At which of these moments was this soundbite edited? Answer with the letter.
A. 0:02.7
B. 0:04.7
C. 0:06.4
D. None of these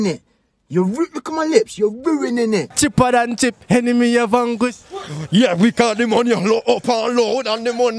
A